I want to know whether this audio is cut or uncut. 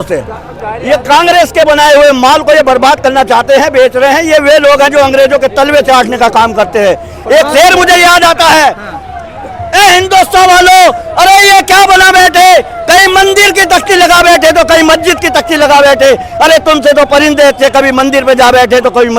uncut